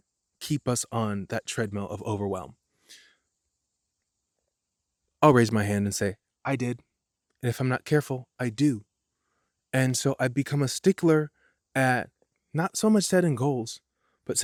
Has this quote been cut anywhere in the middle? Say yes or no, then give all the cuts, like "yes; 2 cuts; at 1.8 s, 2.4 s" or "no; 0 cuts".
no; 0 cuts